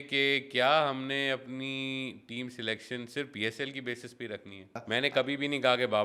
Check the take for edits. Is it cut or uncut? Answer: cut